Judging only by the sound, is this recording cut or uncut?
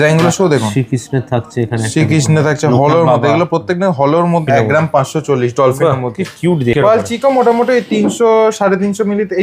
cut